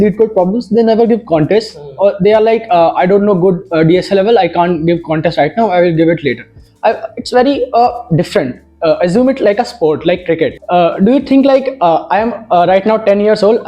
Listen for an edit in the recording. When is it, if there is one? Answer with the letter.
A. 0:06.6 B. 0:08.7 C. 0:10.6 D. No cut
C